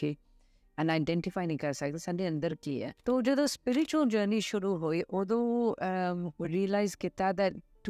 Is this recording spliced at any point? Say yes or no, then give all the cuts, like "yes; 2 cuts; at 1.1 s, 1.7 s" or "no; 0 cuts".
yes; 1 cut; at 2.9 s